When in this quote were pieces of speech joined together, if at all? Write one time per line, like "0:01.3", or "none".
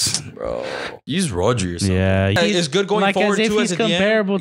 0:01.0
0:02.3

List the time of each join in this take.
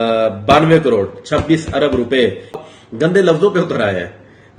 0:02.6

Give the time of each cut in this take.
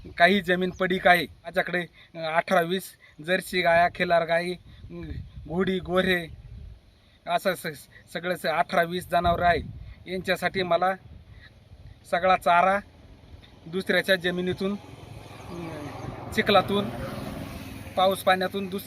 0:01.5

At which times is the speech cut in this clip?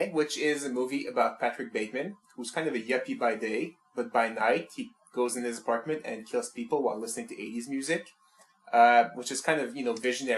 0:07.3

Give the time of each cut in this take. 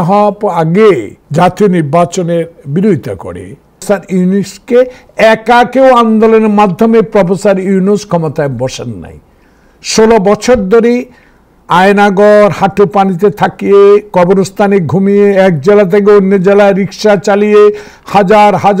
0:01.2
0:03.8

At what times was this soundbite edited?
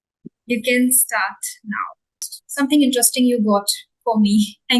0:02.4

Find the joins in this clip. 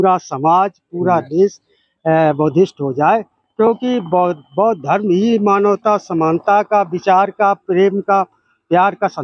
none

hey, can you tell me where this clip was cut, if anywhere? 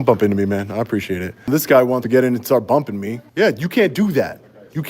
0:01.5
0:03.2

